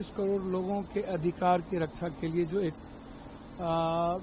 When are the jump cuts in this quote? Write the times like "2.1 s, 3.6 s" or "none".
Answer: none